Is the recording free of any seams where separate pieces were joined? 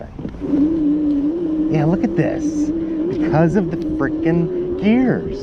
yes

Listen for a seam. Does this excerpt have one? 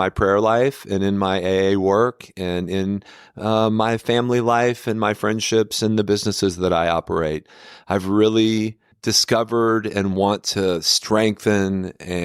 yes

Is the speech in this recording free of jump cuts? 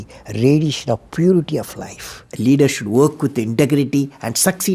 no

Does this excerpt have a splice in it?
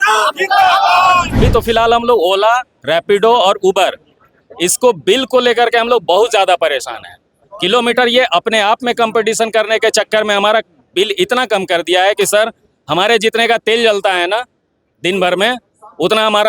yes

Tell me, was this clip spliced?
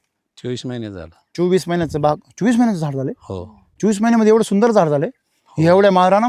no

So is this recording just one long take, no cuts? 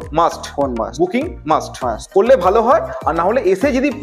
yes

